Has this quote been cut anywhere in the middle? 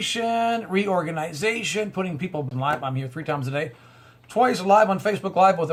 no; 0 cuts

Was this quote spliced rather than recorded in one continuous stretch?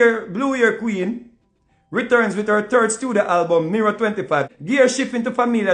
yes; 1 cut; at 4.5 s

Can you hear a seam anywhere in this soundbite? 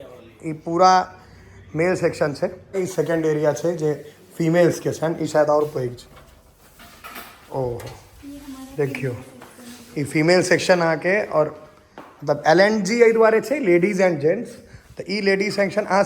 yes; 1 cut; at 2.7 s

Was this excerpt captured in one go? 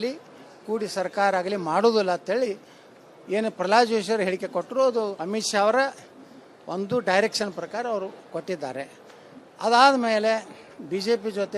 yes; 0 cuts

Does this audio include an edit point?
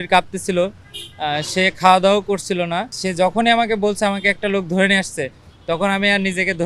yes; 1 cut; at 3.0 s

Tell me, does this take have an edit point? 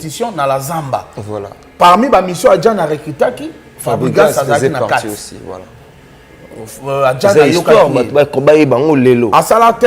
no; 0 cuts

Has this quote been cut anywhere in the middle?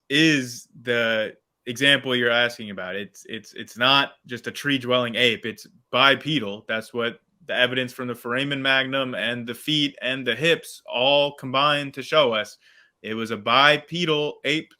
no; 0 cuts

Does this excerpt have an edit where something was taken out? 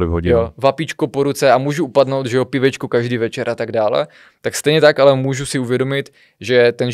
no; 0 cuts

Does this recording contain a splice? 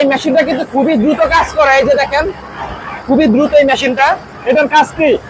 no; 0 cuts

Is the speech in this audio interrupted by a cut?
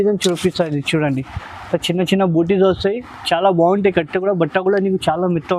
no; 0 cuts

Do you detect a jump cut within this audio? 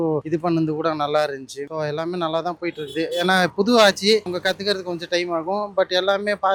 no; 0 cuts

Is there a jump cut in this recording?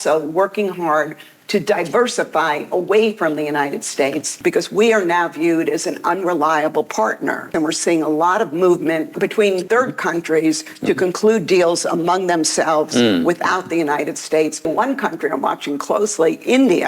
yes; 4 cuts; at 4.3 s, 7.5 s, 9.4 s, 14.6 s

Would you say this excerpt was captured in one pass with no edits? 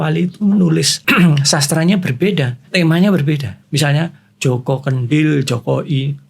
no; 3 cuts; at 0.9 s, 2.7 s, 3.6 s

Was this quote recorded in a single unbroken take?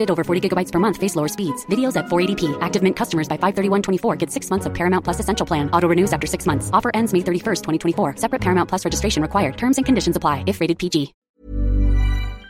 no; 1 cut; at 11.4 s

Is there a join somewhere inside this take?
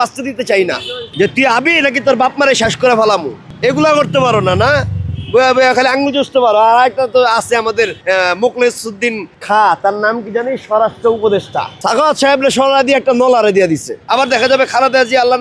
yes; 3 cuts; at 1.1 s, 11.8 s, 13.9 s

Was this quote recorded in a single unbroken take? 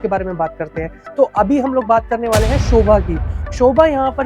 yes; 0 cuts

